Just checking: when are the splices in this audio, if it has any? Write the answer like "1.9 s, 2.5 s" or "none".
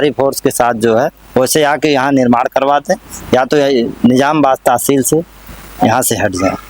none